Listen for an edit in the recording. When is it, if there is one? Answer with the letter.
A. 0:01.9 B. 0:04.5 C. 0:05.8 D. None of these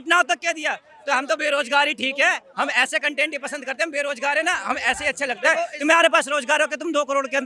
D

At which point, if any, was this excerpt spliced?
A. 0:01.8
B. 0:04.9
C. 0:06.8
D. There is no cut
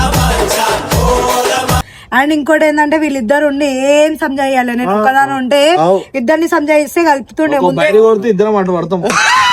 A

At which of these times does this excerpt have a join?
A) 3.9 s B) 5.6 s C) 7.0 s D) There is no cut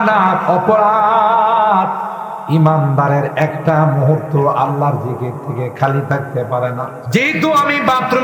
C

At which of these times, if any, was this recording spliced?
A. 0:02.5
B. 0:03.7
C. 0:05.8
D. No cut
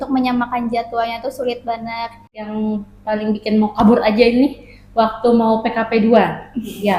A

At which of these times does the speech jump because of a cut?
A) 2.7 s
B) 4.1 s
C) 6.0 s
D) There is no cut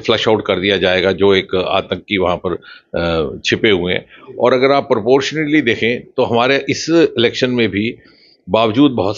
B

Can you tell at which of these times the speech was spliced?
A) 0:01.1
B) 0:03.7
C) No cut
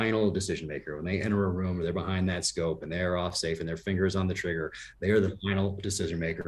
C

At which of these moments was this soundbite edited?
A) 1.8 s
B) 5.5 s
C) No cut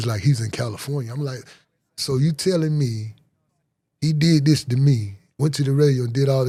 C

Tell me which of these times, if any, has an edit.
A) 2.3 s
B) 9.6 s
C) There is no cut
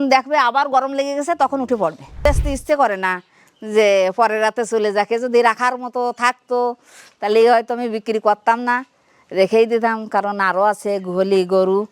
A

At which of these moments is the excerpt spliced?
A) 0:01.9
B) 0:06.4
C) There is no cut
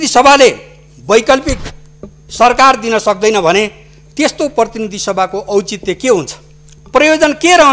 C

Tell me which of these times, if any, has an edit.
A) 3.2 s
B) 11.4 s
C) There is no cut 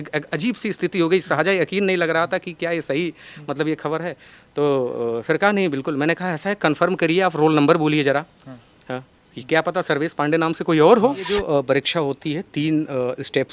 B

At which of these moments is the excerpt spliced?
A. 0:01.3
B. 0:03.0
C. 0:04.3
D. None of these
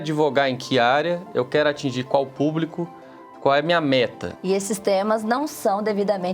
C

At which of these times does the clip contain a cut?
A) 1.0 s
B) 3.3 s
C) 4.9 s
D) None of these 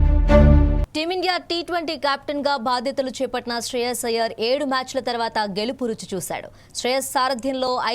A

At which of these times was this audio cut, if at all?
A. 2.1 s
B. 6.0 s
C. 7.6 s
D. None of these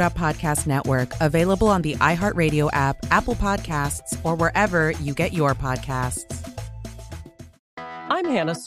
C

